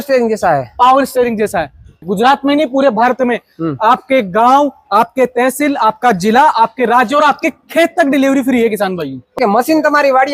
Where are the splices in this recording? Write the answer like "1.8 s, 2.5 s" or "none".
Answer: 2.0 s, 9.4 s